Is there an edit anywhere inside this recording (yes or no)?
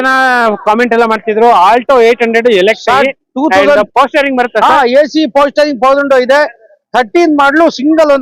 no